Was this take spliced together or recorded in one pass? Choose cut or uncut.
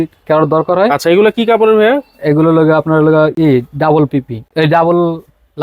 uncut